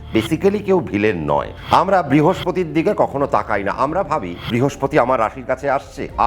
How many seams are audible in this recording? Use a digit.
2